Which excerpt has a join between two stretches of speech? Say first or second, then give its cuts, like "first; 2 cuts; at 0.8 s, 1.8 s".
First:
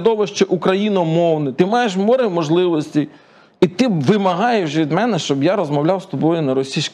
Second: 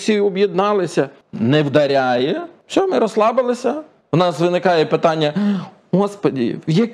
second; 3 cuts; at 1.2 s, 2.5 s, 3.9 s